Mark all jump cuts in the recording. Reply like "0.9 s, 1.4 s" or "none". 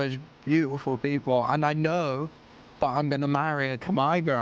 none